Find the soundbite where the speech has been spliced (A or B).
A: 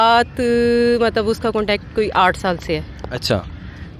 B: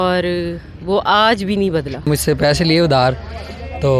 B